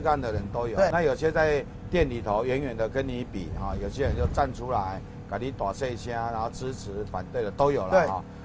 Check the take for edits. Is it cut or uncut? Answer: cut